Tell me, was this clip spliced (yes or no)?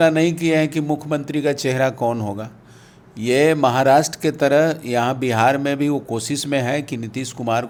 no